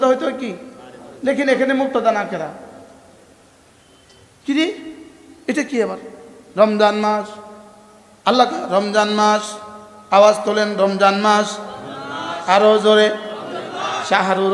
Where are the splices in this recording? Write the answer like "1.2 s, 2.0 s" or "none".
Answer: none